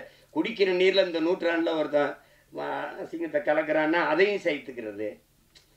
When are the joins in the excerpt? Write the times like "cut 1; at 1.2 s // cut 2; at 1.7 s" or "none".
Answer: none